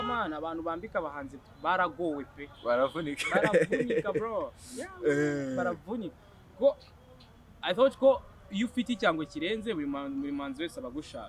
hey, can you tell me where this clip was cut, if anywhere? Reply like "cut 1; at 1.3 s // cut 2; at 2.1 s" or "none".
none